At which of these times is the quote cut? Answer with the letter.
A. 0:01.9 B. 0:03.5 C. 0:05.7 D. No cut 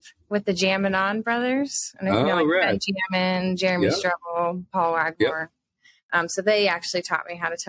D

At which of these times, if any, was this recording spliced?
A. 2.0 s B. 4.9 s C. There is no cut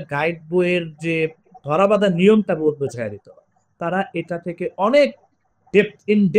C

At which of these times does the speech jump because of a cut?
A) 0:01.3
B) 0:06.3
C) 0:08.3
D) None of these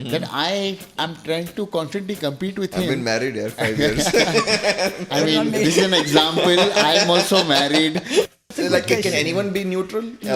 C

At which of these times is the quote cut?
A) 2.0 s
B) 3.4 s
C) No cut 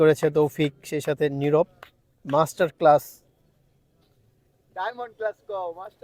C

